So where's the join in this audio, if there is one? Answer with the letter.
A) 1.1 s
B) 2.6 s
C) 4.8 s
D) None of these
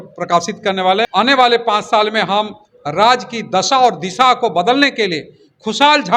A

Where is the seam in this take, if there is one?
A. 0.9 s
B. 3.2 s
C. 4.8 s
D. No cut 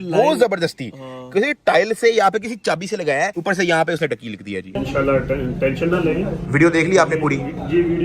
C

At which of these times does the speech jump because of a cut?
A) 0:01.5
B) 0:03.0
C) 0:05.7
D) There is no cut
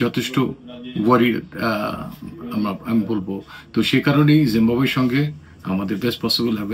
D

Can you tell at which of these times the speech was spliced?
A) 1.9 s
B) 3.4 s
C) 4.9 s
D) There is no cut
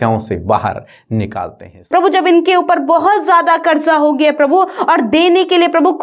A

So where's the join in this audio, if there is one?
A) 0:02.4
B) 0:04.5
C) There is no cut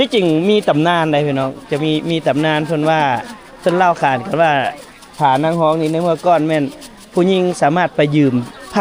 C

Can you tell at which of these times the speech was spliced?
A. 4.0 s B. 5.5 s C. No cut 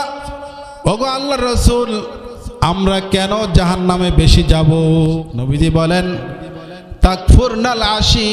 B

